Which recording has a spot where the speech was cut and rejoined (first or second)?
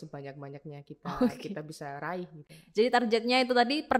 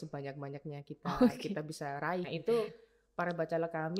second